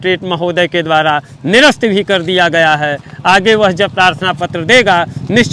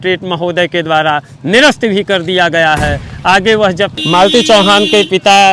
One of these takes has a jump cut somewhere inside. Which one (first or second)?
second